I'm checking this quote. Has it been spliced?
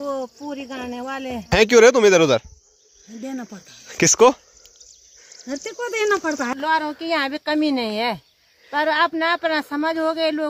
yes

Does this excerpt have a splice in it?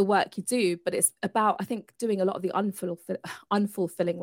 no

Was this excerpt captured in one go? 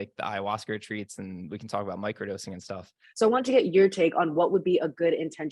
no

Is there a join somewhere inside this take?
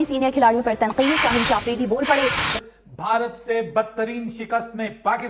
yes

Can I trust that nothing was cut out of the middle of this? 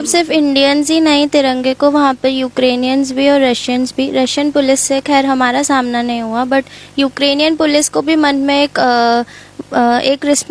yes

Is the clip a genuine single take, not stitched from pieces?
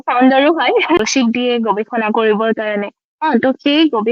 no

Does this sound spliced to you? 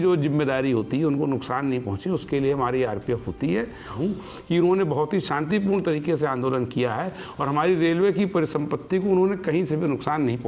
yes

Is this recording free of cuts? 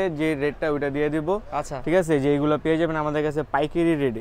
yes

